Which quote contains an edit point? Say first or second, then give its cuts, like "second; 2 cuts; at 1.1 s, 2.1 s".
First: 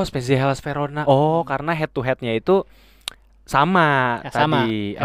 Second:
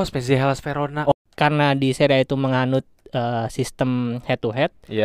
second; 1 cut; at 1.1 s